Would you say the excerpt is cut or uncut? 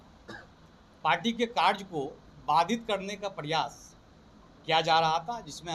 uncut